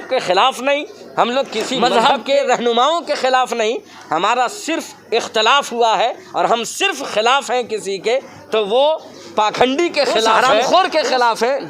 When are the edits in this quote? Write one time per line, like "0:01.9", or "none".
0:01.8
0:10.5